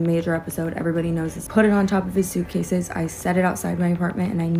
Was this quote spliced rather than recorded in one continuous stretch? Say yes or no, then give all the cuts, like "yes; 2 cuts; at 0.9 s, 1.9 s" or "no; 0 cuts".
no; 0 cuts